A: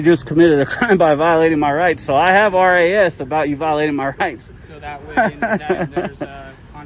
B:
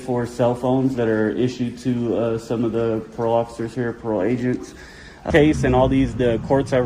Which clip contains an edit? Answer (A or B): B